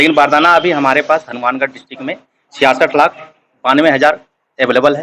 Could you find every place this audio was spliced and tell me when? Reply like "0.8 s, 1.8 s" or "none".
none